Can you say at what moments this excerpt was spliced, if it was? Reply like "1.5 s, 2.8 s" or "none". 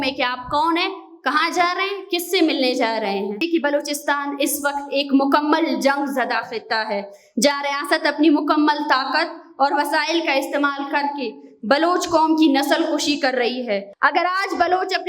3.4 s, 13.9 s